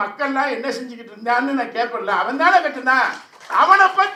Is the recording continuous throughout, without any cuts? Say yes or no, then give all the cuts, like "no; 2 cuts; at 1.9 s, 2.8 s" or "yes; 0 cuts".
yes; 0 cuts